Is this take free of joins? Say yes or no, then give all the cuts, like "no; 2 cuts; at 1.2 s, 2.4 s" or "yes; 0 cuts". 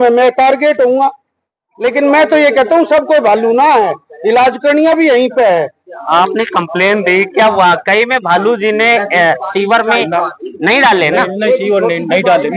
no; 1 cut; at 6.1 s